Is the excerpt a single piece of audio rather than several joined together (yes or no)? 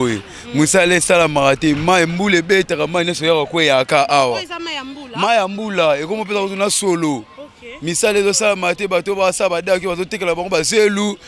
yes